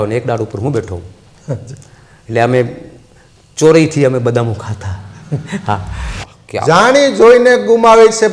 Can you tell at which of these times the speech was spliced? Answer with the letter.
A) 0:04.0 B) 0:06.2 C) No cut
B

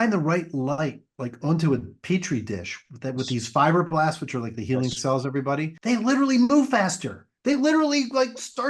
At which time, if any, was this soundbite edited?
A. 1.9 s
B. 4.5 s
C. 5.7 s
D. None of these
D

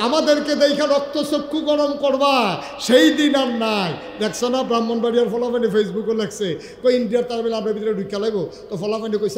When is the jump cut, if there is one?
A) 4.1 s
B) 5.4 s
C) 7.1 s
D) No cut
D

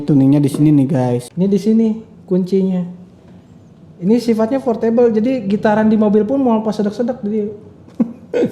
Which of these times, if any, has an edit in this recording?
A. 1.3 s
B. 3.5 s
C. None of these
A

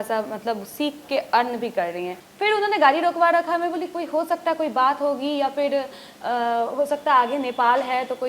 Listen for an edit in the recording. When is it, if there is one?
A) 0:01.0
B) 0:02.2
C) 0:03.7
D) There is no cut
B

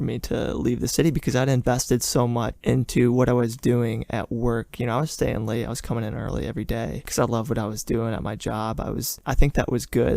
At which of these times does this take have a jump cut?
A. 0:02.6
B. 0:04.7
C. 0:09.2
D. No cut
C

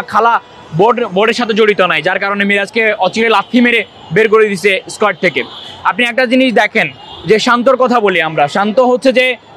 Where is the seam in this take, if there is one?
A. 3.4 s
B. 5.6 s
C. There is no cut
C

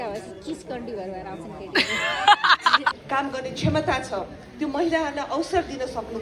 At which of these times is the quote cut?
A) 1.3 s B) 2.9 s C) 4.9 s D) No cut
B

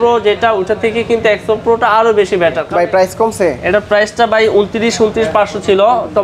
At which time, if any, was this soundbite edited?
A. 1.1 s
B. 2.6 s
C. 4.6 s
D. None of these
B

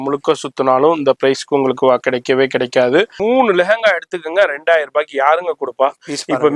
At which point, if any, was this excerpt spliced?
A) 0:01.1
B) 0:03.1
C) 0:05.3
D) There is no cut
B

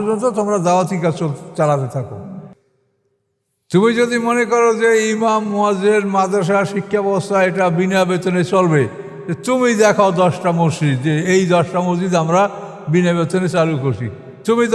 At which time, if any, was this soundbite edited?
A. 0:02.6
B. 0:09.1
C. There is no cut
A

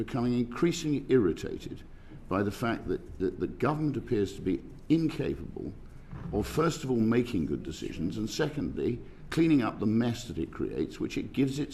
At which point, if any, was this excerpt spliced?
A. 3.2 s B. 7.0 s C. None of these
C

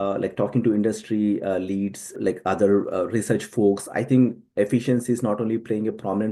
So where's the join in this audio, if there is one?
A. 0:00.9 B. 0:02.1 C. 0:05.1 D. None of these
B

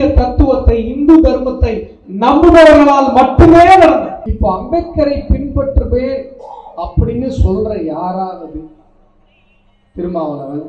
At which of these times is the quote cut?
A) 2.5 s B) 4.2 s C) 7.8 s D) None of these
B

